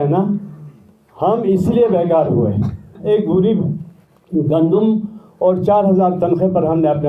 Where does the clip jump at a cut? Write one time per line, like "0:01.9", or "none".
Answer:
0:03.0